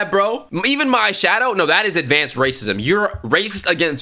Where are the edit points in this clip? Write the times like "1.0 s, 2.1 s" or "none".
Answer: none